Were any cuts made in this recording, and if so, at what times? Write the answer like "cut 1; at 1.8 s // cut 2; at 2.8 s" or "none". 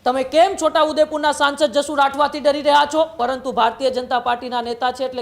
cut 1; at 3.2 s